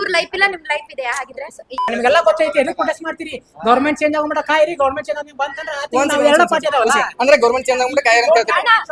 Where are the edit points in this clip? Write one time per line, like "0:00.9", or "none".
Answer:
0:01.9

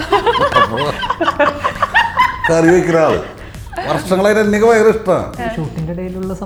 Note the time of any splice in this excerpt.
none

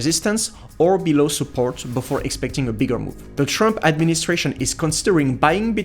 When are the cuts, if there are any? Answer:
0:03.2

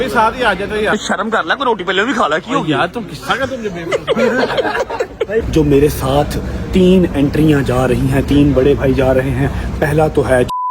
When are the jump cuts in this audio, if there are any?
0:00.9
0:05.5

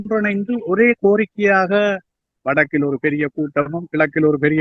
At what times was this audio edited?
0:02.3

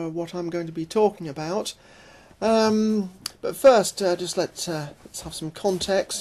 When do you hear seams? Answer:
0:02.6

